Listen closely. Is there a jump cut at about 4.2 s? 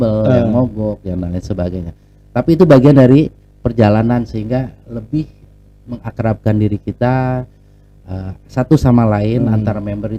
no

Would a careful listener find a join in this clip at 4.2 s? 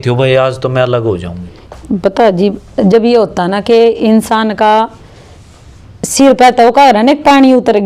no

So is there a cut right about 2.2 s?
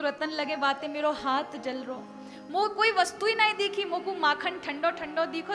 no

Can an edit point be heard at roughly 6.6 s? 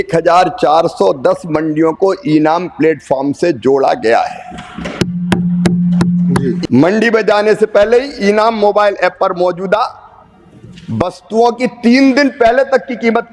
yes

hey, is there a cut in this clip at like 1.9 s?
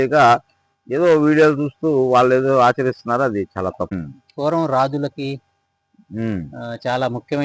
no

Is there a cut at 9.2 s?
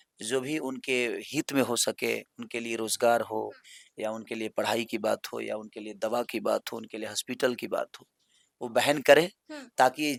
no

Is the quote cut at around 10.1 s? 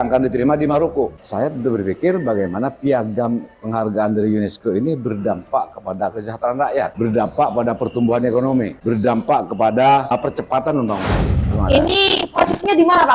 yes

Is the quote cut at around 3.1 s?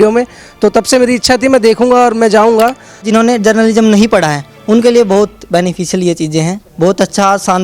yes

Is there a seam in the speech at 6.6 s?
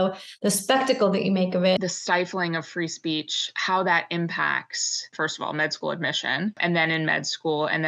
yes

